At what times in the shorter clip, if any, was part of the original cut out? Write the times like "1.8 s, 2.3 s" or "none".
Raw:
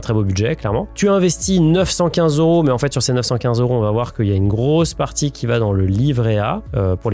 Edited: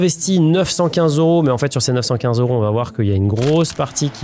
none